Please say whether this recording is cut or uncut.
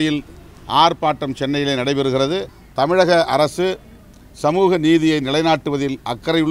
cut